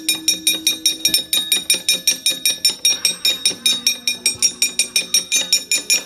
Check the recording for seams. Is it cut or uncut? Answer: cut